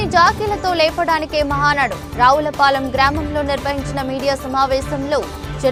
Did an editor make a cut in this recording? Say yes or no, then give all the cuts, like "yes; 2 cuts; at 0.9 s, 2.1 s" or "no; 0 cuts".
no; 0 cuts